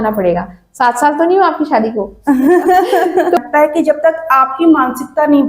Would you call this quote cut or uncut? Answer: cut